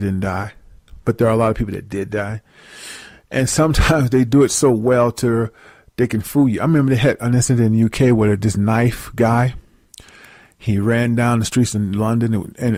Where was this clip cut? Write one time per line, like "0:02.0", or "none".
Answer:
none